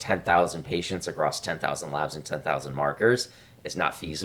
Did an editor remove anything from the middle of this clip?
no; 0 cuts

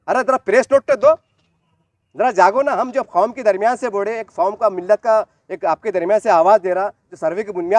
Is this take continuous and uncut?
yes; 0 cuts

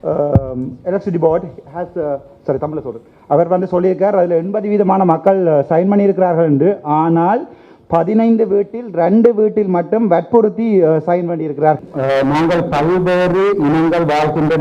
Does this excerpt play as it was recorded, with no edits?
no; 1 cut; at 11.8 s

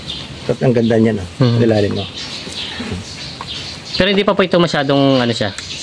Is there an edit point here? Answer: no; 0 cuts

